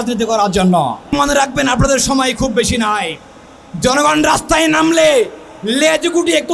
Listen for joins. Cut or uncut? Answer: cut